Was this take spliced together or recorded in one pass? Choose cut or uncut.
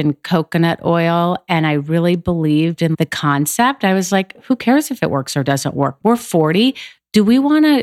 cut